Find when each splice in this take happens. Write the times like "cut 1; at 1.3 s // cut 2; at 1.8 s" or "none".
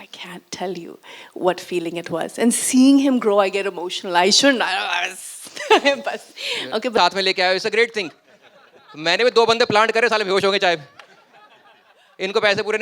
cut 1; at 7.0 s